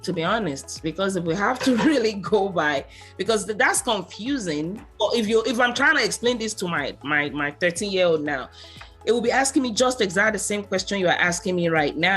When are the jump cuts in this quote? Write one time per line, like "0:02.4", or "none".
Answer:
0:04.8